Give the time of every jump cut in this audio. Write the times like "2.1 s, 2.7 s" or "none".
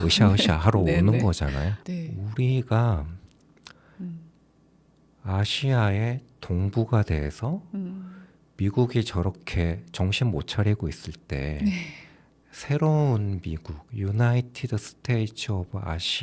1.8 s